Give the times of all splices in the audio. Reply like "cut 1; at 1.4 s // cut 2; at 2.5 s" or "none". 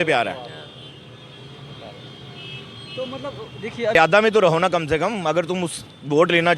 cut 1; at 3.9 s